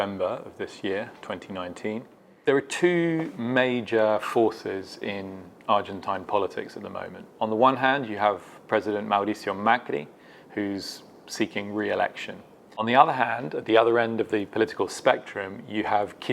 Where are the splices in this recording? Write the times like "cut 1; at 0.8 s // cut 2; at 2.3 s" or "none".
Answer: cut 1; at 2.2 s // cut 2; at 12.8 s